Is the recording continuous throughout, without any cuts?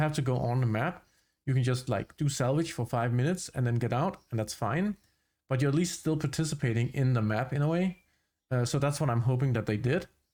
yes; 0 cuts

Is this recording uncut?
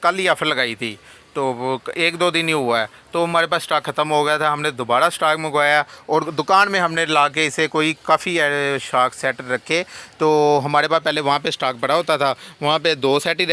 yes; 0 cuts

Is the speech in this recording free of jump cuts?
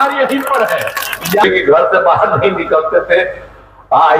no; 1 cut; at 1.4 s

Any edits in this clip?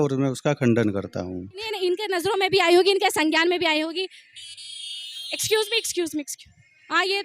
yes; 1 cut; at 1.7 s

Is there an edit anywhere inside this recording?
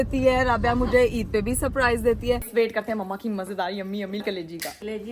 yes; 2 cuts; at 2.4 s, 4.2 s

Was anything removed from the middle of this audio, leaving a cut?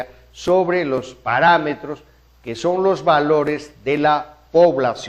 no; 0 cuts

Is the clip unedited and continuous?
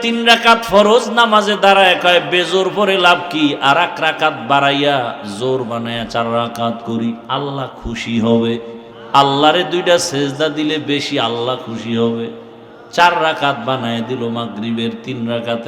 no; 1 cut; at 7.2 s

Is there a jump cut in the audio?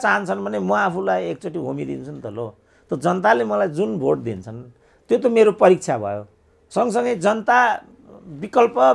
no; 0 cuts

